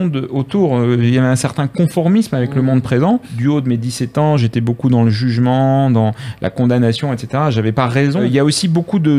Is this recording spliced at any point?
yes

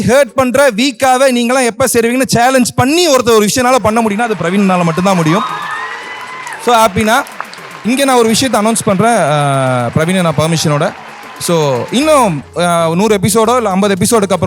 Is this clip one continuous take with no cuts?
no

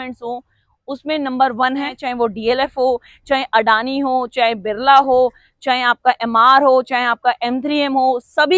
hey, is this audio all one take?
no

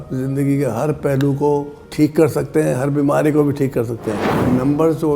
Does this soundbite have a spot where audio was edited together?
yes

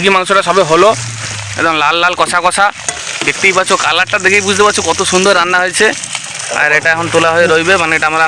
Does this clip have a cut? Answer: no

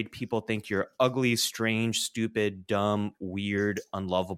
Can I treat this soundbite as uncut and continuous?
yes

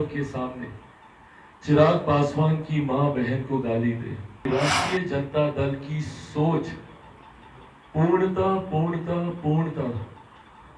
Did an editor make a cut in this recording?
yes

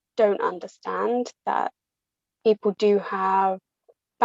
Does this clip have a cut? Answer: no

